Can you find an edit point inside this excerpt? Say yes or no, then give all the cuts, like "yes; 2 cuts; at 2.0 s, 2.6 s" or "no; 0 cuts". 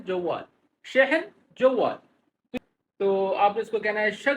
yes; 1 cut; at 2.5 s